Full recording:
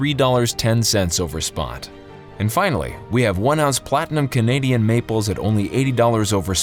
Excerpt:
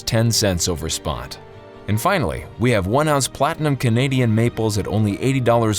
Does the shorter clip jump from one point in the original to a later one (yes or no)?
no